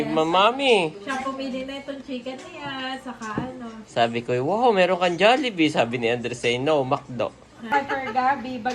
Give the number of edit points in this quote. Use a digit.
1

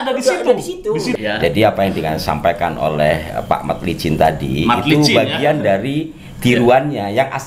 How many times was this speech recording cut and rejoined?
1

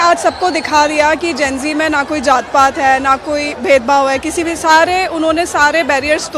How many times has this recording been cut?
0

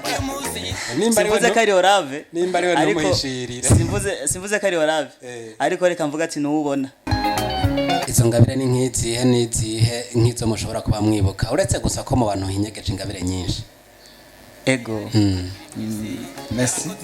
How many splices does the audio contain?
1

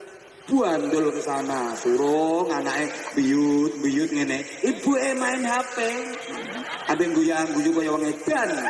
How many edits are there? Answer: 0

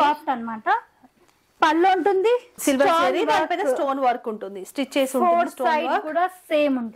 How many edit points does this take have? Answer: 1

